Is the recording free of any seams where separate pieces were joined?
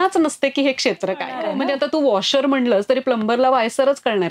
no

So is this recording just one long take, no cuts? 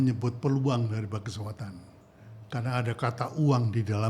yes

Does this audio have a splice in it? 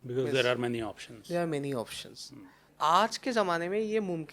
yes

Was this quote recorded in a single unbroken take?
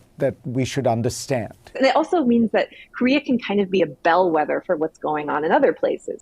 no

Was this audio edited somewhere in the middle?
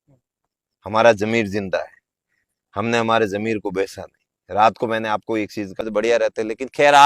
yes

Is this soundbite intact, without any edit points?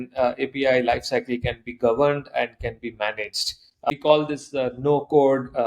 no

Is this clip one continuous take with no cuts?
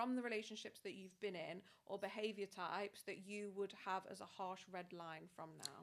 yes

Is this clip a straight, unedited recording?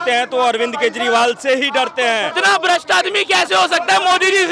no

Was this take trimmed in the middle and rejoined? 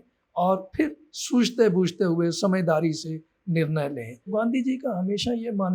yes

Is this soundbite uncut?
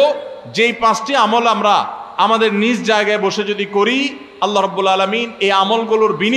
yes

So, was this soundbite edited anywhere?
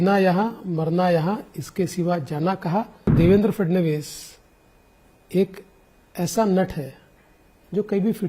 yes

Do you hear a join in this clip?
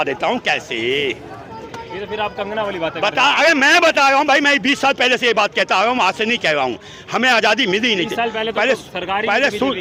no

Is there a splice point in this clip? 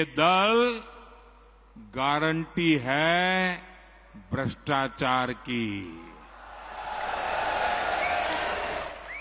no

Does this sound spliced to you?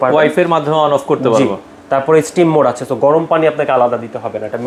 no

